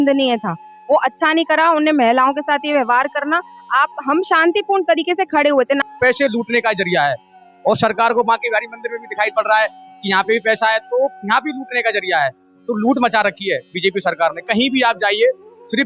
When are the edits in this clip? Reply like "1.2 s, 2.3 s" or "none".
5.8 s